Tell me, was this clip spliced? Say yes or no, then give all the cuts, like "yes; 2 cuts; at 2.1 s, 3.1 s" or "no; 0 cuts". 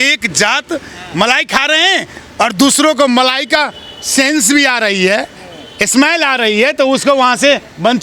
no; 0 cuts